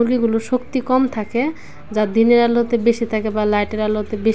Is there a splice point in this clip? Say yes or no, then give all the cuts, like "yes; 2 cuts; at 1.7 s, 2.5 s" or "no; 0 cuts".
no; 0 cuts